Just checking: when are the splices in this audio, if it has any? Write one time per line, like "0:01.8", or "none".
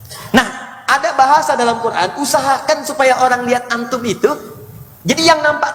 none